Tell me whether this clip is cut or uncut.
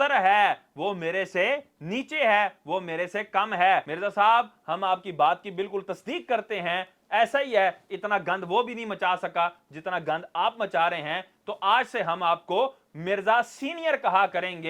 uncut